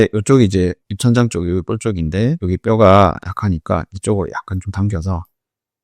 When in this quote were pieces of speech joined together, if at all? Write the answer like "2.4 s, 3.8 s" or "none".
none

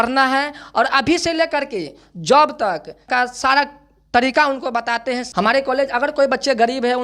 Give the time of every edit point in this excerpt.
3.0 s, 5.3 s

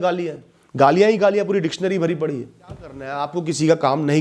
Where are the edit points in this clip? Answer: 3.1 s

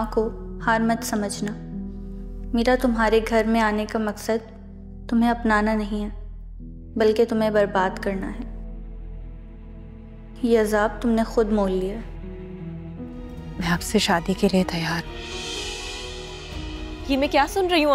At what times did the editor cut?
13.5 s

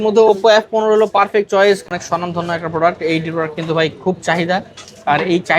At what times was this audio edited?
1.8 s

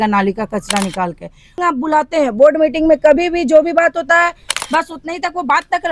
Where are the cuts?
1.6 s

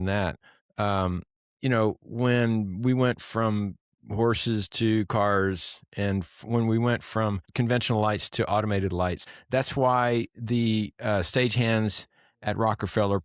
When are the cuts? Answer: 7.4 s, 9.2 s

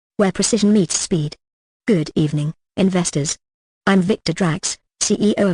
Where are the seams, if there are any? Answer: 2.9 s

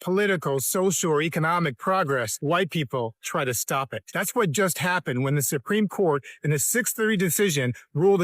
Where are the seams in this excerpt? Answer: 2.3 s, 4.0 s

